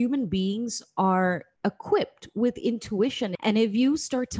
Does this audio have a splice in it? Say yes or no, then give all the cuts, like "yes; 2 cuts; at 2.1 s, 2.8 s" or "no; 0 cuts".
yes; 2 cuts; at 1.5 s, 3.3 s